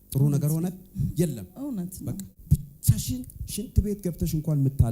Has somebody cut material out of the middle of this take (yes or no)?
yes